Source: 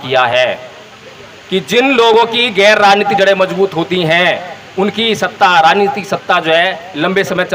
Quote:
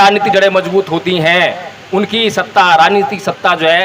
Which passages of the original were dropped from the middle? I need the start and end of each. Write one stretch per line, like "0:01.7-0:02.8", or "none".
none